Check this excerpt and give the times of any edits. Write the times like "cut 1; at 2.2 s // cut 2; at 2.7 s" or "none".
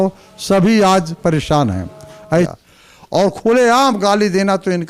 cut 1; at 2.5 s